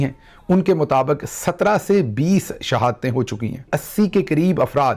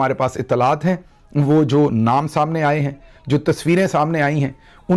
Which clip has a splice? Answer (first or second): first